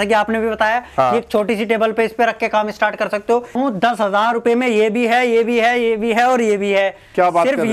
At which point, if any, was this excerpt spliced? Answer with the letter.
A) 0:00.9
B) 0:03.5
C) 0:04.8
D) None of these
B